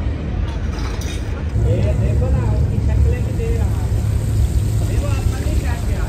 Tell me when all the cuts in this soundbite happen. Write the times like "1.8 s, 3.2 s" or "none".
1.5 s